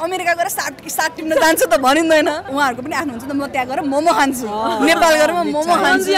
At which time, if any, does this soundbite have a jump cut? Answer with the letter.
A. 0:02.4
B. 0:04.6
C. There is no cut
A